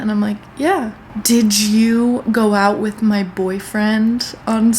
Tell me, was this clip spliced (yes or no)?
yes